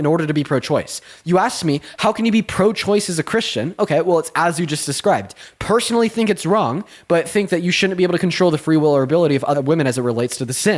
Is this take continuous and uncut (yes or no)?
no